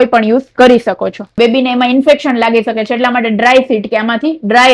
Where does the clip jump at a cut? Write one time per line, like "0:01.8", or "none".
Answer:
0:01.2